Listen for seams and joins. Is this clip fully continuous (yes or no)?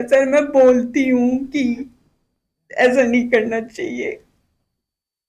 yes